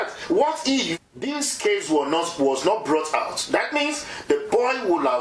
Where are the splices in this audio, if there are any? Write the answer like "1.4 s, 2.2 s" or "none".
1.0 s